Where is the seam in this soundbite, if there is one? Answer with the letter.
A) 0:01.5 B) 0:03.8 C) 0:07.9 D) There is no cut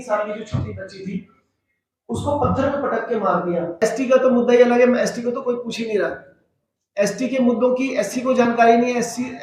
B